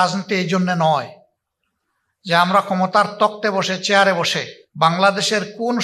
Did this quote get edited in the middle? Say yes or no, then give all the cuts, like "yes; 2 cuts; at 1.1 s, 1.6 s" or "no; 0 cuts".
yes; 1 cut; at 4.9 s